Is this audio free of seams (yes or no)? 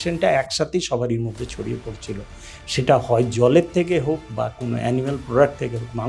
yes